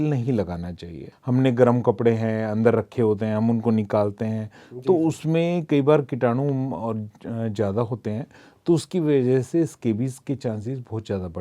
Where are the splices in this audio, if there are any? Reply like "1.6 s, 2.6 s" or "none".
1.1 s